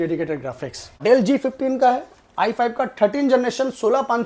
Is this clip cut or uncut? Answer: cut